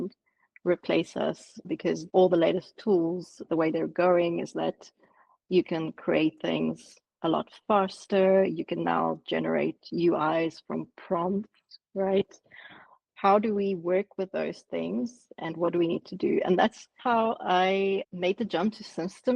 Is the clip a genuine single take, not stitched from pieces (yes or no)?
no